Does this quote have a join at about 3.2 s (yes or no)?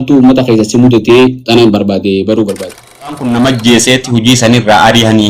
yes